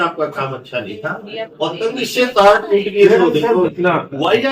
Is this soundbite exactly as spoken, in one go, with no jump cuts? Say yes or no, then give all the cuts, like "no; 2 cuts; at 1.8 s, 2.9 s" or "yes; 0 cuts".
no; 2 cuts; at 1.5 s, 3.7 s